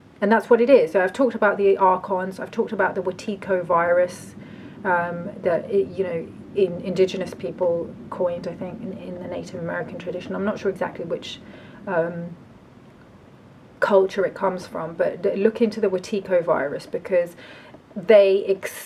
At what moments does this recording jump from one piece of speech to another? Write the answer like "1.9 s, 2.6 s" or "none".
none